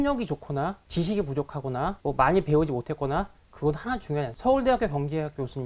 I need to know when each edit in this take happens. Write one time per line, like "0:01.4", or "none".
0:00.8
0:02.0
0:04.3